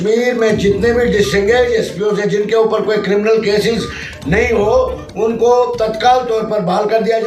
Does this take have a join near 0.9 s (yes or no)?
no